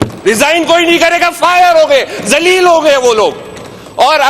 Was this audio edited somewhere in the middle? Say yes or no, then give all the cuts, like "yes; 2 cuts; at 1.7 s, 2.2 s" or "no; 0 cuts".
no; 0 cuts